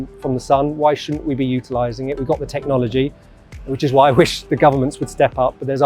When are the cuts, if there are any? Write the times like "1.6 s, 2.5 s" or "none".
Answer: none